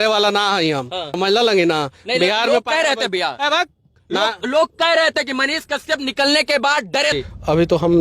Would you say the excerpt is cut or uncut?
cut